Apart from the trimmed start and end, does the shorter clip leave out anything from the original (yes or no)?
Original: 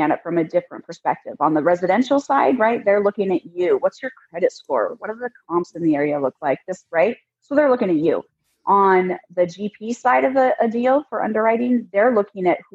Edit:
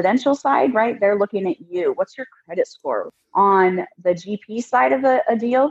yes